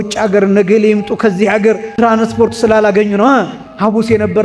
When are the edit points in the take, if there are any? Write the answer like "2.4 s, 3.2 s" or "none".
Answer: 1.9 s